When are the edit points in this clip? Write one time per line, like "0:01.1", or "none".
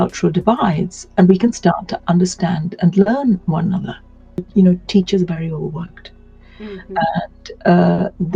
0:04.5